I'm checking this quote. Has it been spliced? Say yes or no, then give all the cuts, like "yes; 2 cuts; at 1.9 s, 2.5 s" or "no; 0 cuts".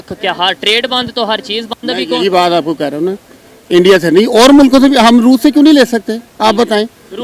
no; 0 cuts